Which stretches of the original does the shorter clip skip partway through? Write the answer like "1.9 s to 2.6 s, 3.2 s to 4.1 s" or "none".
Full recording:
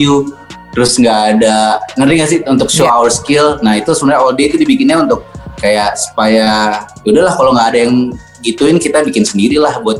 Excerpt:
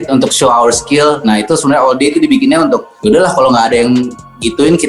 5.3 s to 6.9 s